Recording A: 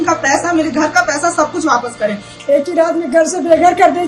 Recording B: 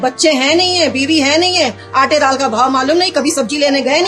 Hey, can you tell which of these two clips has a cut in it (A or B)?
A